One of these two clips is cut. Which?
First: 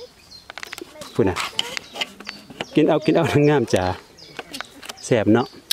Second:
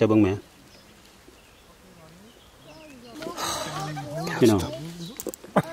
second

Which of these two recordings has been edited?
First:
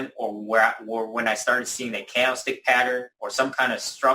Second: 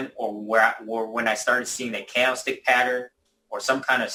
first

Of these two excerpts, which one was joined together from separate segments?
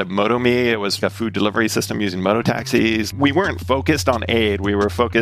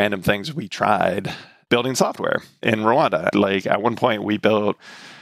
first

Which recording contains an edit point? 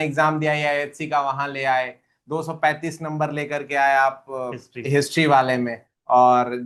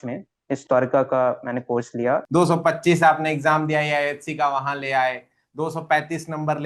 second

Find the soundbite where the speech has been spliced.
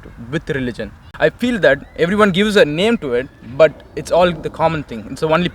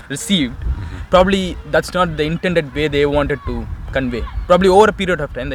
first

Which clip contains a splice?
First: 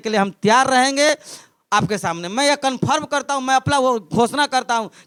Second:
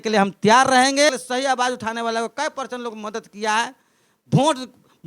second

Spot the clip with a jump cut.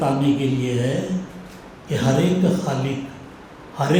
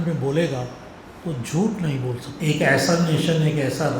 second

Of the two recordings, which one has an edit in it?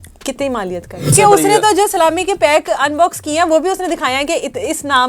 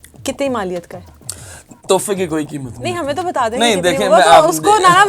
first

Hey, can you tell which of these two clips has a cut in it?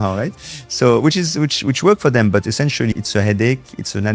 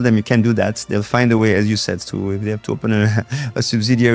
first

